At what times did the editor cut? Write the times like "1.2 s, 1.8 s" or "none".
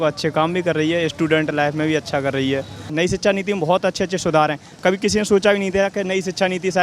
2.9 s